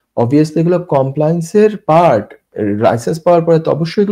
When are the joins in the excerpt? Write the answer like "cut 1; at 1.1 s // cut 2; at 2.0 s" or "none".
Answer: none